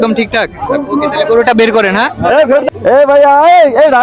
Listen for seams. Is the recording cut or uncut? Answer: cut